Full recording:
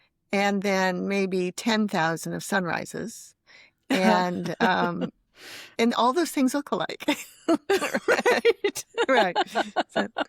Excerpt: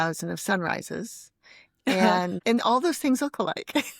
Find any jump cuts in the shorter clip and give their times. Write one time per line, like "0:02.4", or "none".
0:02.4